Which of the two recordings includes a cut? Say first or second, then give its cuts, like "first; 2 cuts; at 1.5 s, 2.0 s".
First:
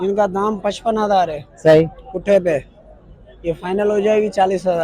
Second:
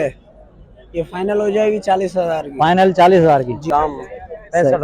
second; 1 cut; at 3.7 s